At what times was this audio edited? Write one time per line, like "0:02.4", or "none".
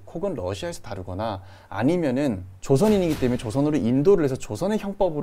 0:02.5